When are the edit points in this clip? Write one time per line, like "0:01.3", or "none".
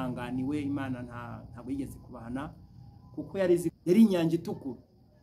0:03.7